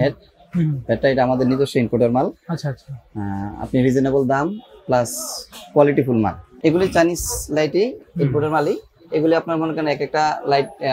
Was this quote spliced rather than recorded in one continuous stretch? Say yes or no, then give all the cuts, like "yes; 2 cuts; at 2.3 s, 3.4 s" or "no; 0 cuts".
yes; 1 cut; at 6.4 s